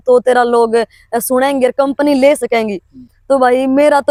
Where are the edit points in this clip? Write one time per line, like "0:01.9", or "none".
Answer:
none